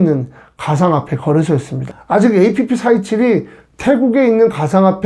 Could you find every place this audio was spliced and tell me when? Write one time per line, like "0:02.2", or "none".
0:01.8